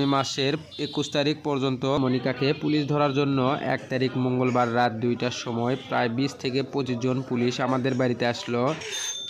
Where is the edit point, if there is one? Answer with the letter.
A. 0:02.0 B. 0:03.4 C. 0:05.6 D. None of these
A